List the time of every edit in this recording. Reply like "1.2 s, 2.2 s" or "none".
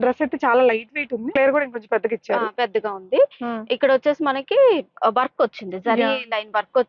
1.4 s